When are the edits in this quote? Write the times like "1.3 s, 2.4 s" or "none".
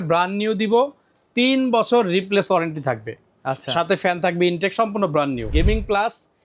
5.5 s